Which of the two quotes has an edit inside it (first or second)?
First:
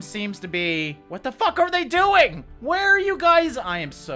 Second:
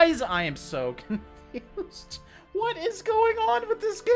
first